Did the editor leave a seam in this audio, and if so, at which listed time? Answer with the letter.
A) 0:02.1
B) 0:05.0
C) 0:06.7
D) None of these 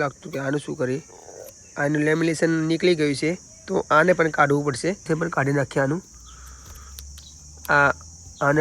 B